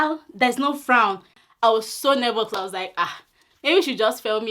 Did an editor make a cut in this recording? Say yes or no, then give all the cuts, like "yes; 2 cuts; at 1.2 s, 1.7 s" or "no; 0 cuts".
yes; 1 cut; at 1.3 s